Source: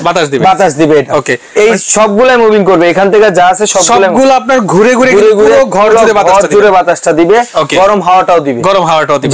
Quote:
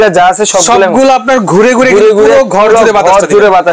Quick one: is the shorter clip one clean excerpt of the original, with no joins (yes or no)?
yes